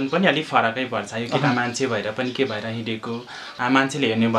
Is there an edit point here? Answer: yes; 1 cut; at 3.4 s

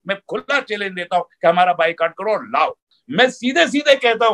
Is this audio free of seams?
no; 1 cut; at 3.0 s

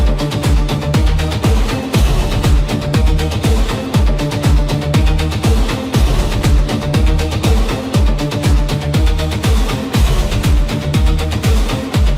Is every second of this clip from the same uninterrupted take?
yes; 0 cuts

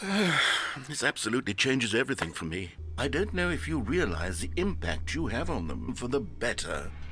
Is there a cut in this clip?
yes; 2 cuts; at 2.7 s, 5.9 s

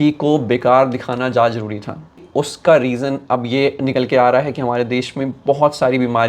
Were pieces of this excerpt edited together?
yes; 1 cut; at 2.2 s

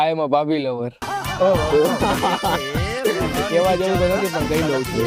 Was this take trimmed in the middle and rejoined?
no; 0 cuts

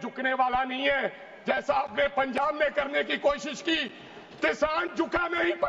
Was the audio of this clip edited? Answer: no; 0 cuts

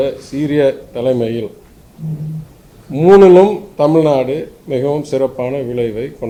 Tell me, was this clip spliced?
no; 0 cuts

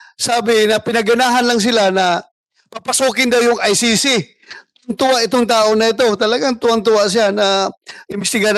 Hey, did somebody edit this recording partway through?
no; 0 cuts

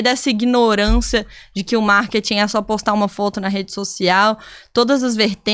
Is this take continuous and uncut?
yes; 0 cuts

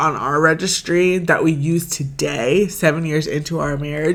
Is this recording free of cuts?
yes; 0 cuts

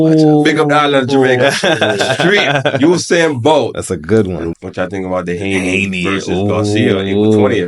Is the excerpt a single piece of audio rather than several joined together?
no; 1 cut; at 4.5 s

